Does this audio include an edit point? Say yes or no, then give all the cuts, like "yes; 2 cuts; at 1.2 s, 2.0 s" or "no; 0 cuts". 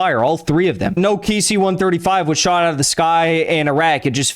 yes; 1 cut; at 0.9 s